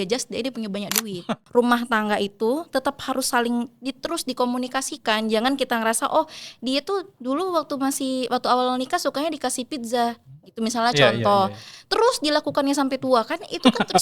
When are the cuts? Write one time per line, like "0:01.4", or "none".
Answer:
0:01.2